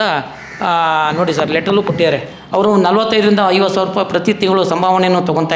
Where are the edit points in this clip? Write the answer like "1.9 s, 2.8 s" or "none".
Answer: 2.3 s